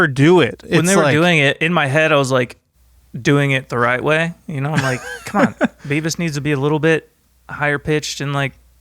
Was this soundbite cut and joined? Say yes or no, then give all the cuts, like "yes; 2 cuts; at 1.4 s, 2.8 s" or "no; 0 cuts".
yes; 1 cut; at 1.1 s